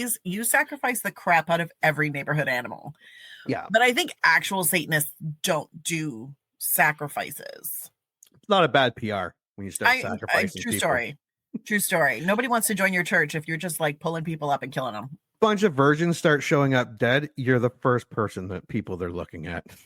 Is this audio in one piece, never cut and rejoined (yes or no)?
yes